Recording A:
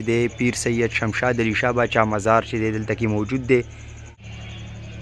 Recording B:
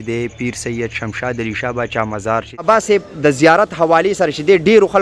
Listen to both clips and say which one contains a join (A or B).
B